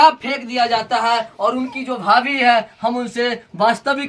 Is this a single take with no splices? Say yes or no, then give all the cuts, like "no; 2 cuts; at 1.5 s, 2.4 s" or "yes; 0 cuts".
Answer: yes; 0 cuts